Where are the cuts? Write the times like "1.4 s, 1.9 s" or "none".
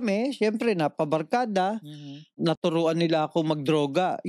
2.4 s